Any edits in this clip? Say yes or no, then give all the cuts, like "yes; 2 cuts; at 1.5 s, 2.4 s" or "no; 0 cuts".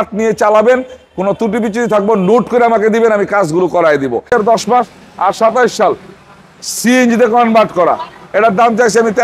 yes; 1 cut; at 4.3 s